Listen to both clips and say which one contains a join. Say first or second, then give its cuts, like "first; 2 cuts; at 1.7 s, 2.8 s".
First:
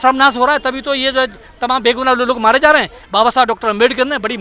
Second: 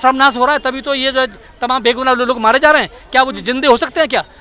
first; 1 cut; at 3.0 s